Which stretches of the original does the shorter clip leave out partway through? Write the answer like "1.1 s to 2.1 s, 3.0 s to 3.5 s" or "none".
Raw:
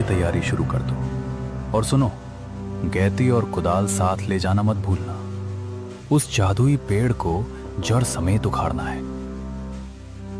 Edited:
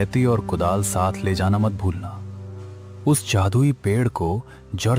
none